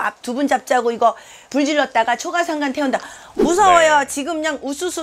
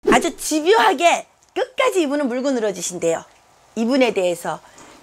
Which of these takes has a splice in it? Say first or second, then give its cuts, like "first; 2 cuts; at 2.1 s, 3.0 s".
first; 1 cut; at 3.3 s